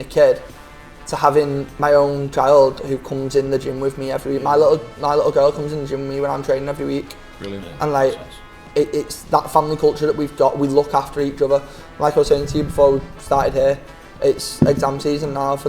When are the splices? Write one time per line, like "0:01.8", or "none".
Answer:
0:01.7